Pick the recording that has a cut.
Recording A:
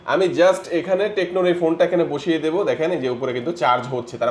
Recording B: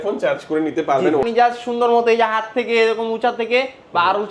B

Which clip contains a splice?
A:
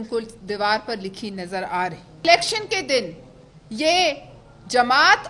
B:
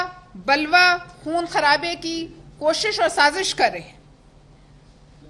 A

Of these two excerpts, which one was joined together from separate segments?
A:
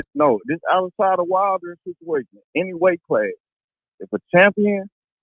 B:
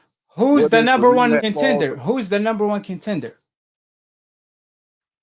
B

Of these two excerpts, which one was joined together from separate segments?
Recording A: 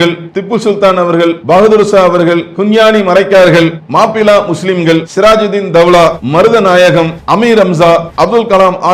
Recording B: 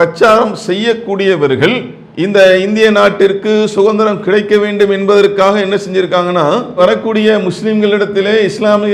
A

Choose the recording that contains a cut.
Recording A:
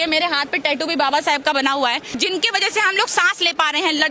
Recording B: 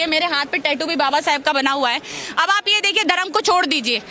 A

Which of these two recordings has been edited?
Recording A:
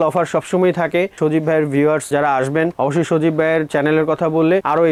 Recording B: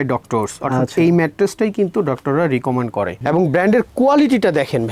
B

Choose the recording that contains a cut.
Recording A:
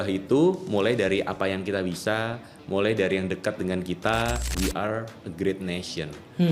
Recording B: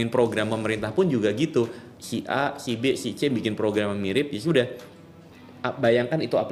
A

